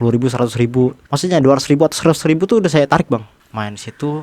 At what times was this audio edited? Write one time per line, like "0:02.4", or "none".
0:01.1
0:03.3